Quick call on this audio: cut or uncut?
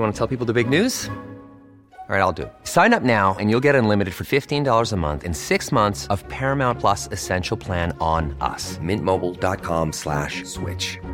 uncut